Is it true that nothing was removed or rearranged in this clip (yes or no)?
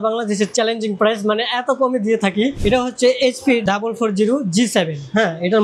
no